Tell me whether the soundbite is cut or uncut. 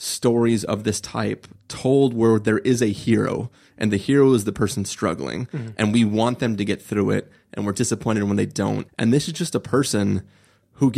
cut